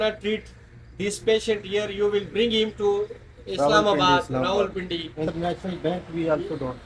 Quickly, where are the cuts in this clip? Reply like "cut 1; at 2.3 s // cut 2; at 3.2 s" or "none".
cut 1; at 5.3 s